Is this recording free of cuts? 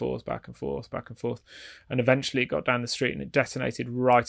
yes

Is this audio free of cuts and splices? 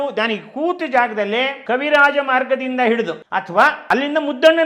no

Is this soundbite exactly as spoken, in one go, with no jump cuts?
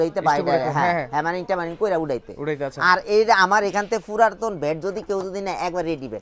yes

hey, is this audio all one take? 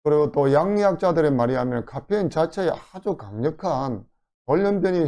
yes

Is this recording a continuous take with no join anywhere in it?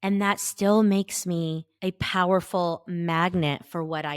no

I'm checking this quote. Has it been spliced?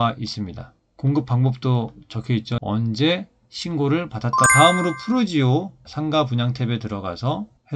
yes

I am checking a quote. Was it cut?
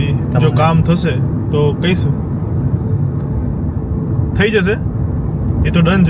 no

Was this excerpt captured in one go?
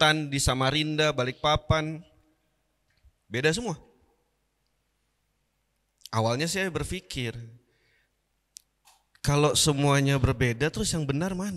yes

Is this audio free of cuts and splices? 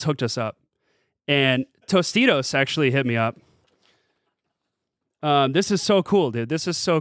yes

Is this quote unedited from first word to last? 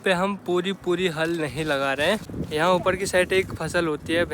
no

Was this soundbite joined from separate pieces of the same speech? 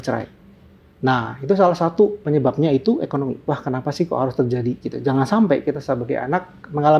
yes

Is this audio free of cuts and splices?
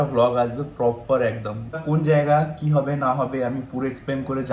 no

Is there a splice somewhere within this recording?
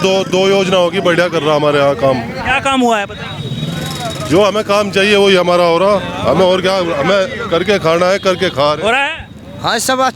no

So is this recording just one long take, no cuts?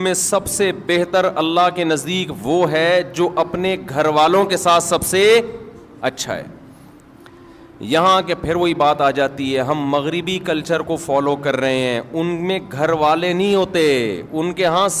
yes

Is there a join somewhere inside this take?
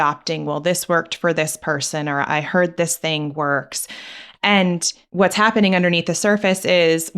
yes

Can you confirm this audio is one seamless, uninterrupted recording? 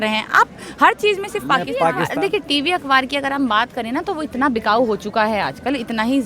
no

